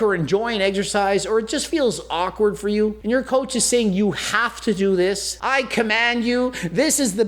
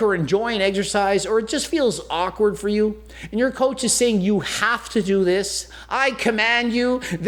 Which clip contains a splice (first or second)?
first